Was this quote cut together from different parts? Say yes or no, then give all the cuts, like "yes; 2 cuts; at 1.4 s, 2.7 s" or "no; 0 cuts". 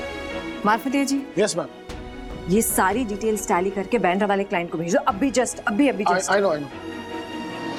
no; 0 cuts